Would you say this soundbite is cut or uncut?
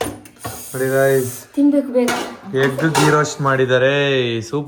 uncut